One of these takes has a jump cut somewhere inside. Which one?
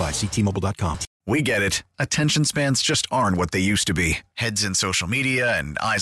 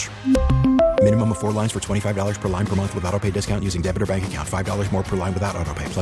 first; 1 cut; at 1.1 s

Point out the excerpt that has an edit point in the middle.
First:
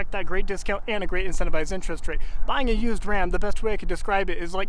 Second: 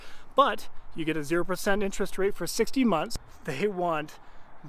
second; 1 cut; at 3.2 s

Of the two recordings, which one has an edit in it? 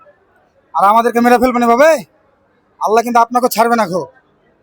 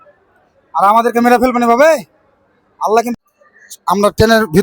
second; 1 cut; at 3.1 s

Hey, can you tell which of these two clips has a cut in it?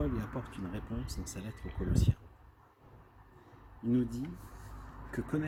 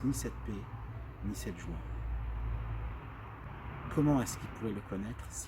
second; 1 cut; at 3.5 s

